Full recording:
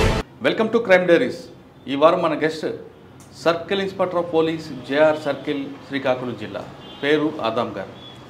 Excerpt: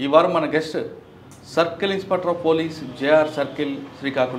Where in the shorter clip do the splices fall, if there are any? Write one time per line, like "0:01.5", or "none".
none

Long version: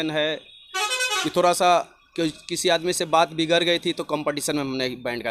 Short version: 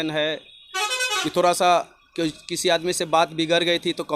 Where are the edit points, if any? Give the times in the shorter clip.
none

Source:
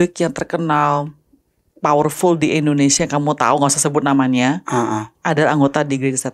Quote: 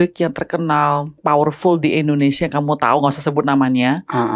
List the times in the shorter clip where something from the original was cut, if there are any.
0:01.1

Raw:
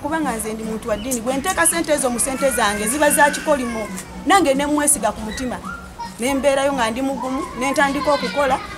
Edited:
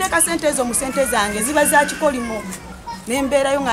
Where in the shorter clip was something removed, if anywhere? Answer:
0:02.6

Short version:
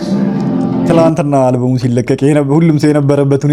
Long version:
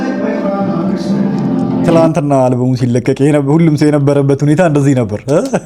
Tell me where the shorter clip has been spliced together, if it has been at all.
none

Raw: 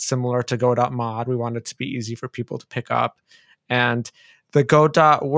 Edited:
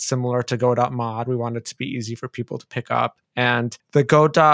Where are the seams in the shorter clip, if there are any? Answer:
0:03.6

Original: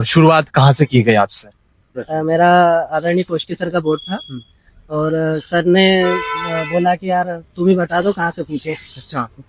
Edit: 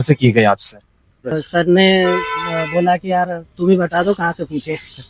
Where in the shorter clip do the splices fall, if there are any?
0:01.3

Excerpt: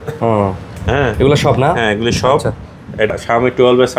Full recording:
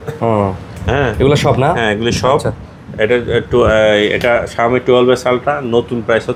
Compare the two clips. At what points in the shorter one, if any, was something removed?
0:03.1

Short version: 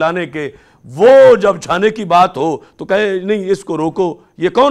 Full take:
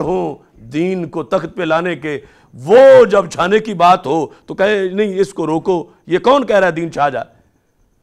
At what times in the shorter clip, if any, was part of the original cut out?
none

